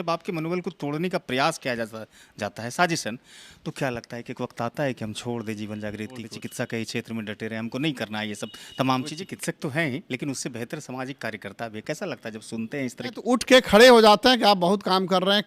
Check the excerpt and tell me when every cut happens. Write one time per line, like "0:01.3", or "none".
0:06.3
0:09.2
0:13.3